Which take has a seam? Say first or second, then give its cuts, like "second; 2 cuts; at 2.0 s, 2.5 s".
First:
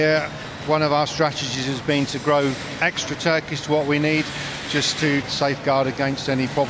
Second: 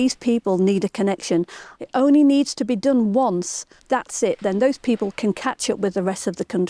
first; 1 cut; at 5.3 s